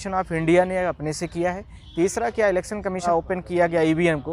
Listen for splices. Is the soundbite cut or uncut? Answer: cut